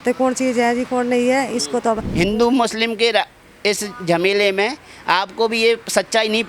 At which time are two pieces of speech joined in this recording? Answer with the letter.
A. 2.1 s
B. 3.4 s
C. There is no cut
A